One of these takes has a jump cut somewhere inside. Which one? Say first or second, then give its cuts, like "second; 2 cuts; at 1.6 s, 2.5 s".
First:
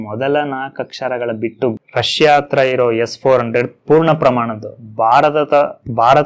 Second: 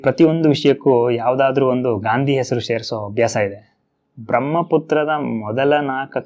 first; 1 cut; at 1.8 s